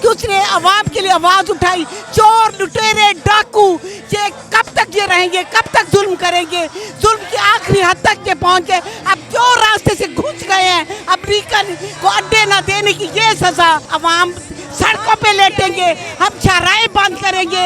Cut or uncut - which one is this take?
cut